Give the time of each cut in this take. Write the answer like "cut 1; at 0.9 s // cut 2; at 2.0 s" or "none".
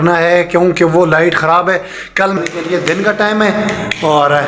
cut 1; at 2.4 s